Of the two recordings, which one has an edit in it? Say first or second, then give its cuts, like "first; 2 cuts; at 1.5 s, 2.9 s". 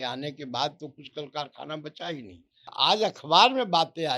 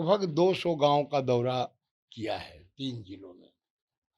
first; 1 cut; at 2.7 s